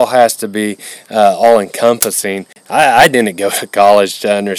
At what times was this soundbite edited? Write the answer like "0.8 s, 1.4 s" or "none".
2.5 s